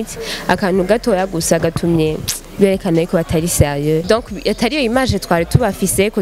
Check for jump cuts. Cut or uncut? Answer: cut